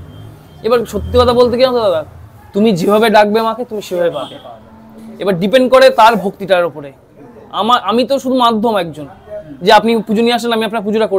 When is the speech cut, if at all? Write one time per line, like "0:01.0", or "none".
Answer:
none